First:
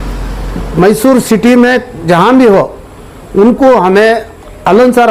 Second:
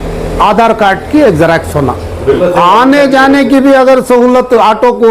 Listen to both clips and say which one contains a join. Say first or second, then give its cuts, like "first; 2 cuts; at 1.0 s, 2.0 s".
second; 1 cut; at 2.4 s